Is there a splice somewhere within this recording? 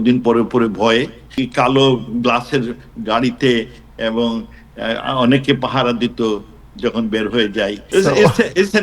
yes; 2 cuts; at 1.4 s, 7.8 s

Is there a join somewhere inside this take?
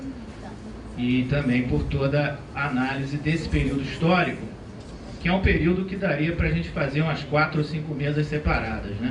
yes; 1 cut; at 4.1 s

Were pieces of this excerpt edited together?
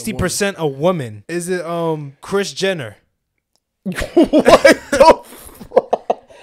yes; 2 cuts; at 1.2 s, 2.1 s

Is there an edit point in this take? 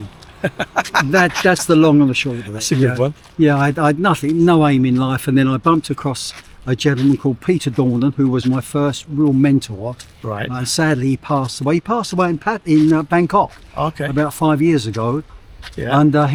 no; 0 cuts

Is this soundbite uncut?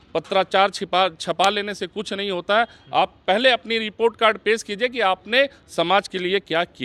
yes; 0 cuts

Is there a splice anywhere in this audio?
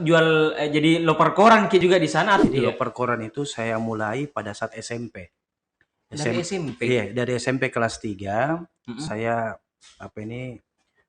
yes; 1 cut; at 2.4 s

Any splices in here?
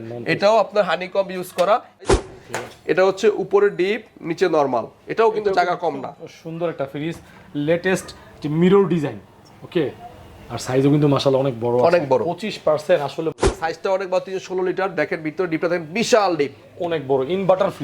yes; 2 cuts; at 2.2 s, 13.4 s

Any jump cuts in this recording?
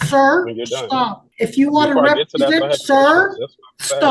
yes; 1 cut; at 1.2 s

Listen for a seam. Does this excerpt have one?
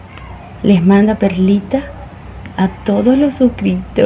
no; 0 cuts

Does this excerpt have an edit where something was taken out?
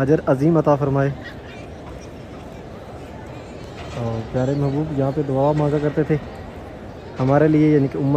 no; 0 cuts

